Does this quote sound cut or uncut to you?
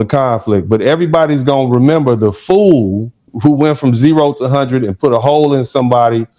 cut